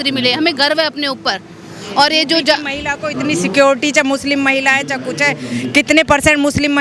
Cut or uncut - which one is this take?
uncut